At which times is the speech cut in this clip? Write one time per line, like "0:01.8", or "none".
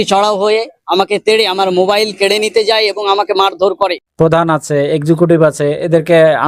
0:04.0